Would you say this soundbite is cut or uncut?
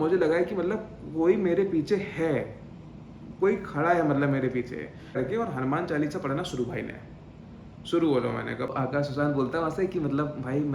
cut